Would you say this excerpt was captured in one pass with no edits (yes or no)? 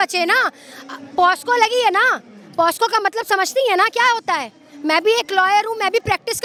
yes